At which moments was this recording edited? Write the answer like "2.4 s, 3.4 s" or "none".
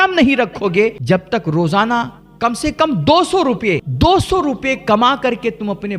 1.0 s, 3.9 s